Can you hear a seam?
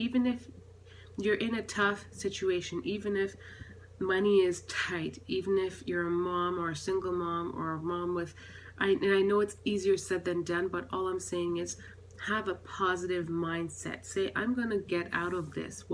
no; 0 cuts

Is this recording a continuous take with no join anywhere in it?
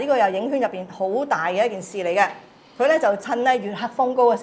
yes; 0 cuts

